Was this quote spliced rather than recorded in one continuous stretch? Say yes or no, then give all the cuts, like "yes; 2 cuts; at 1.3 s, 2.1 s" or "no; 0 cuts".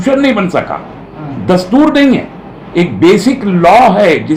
no; 0 cuts